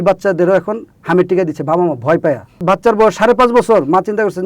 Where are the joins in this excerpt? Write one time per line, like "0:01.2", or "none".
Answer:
0:02.6